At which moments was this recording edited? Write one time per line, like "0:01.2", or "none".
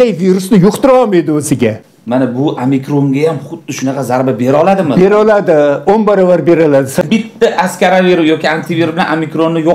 0:01.8
0:07.0

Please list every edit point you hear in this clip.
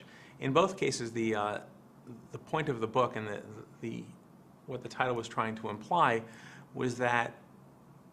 0:05.7

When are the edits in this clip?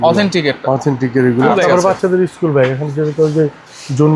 0:01.5

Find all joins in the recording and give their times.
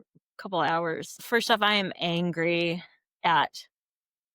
0:01.1

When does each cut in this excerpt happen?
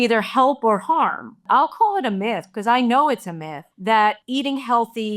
0:01.4
0:04.2

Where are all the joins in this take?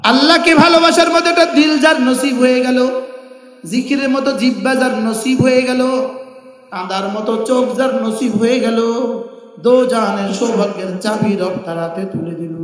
none

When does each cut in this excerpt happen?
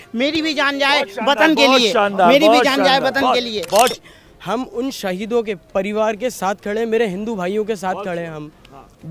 0:03.9

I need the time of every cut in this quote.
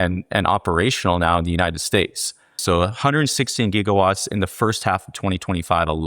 0:02.6

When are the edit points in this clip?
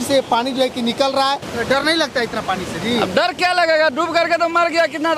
0:01.5

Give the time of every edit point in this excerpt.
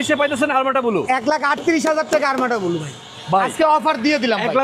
none

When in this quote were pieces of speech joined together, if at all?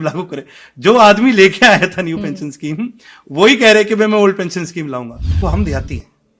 0:05.3

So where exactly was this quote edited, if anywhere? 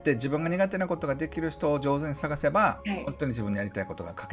0:02.8

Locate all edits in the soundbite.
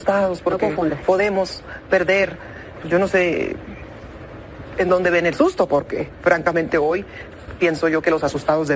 none

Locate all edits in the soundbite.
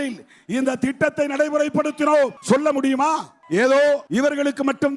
0:02.4
0:03.3
0:04.1

